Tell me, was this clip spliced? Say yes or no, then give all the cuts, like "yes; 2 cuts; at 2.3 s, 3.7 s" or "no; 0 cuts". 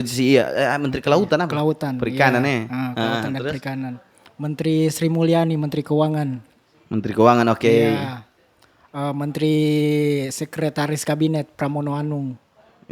no; 0 cuts